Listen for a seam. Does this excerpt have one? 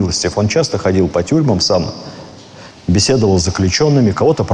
no; 0 cuts

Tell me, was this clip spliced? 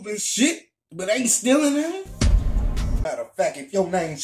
yes; 1 cut; at 2.9 s

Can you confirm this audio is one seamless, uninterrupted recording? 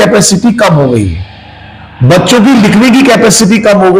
yes; 0 cuts

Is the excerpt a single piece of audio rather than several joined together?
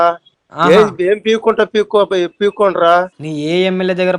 no; 1 cut; at 3.1 s

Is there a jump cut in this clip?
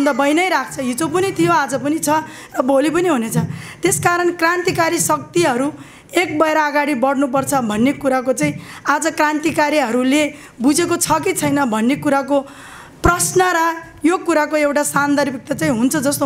no; 0 cuts

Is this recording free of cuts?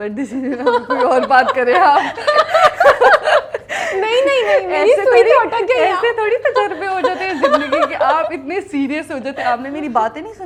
yes; 0 cuts

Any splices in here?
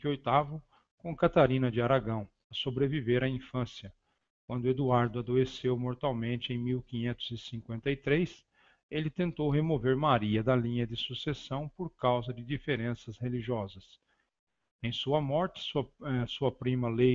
no; 0 cuts

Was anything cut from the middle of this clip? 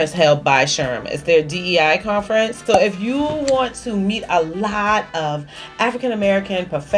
yes; 1 cut; at 2.6 s

